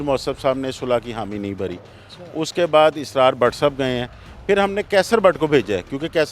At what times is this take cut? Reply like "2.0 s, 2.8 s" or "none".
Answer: none